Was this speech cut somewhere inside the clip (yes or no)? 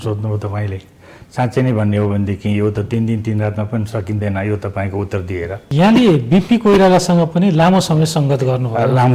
yes